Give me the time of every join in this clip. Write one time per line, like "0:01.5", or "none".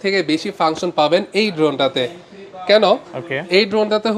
none